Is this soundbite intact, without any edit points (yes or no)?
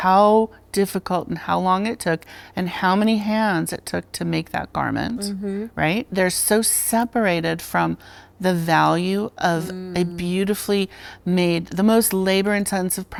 yes